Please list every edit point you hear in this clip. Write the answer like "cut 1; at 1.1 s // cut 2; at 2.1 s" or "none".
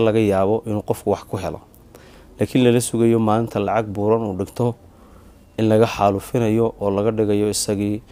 none